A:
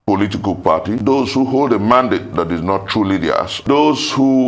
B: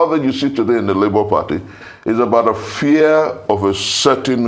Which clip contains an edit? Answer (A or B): A